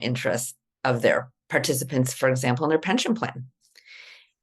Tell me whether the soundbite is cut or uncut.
cut